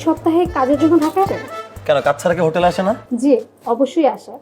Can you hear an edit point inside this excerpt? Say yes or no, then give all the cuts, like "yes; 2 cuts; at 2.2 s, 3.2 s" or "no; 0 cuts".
yes; 2 cuts; at 1.3 s, 3.0 s